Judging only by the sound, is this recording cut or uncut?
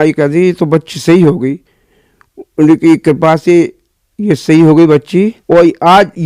uncut